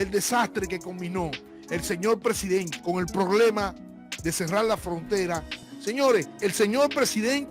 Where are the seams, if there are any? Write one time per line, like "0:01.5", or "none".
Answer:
0:02.7
0:05.7